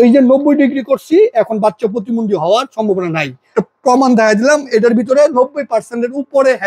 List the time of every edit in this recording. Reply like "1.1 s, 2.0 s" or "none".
3.4 s